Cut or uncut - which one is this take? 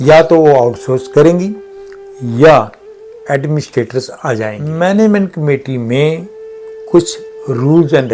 cut